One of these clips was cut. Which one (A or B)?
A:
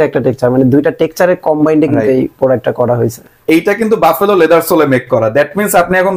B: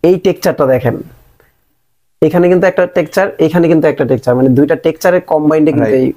A